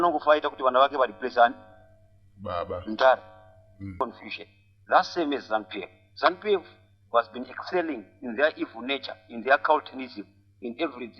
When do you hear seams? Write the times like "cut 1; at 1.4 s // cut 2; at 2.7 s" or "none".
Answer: cut 1; at 4.0 s